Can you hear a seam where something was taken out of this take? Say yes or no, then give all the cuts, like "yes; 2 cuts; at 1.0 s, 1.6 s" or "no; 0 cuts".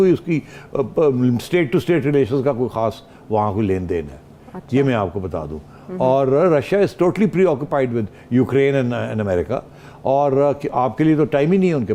no; 0 cuts